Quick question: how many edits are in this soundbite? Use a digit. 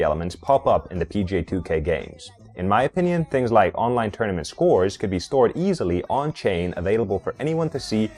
0